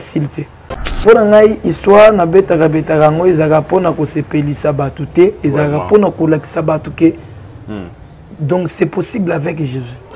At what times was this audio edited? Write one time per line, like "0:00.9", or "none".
0:01.0